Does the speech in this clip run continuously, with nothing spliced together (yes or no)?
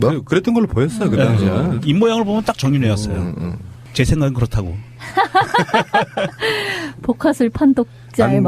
no